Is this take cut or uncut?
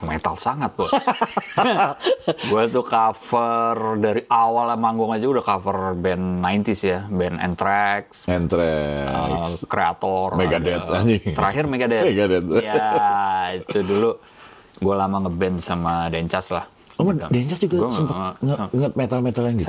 uncut